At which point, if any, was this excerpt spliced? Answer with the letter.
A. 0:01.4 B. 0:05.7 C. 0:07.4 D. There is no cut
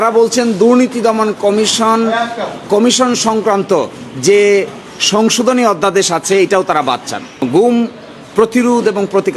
C